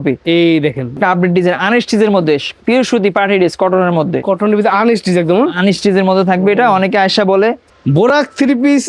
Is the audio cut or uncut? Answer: cut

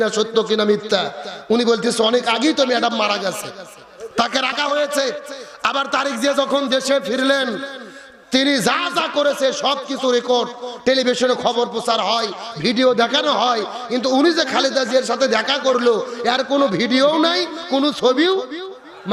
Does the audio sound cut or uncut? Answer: uncut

